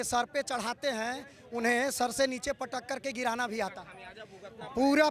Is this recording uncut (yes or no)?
yes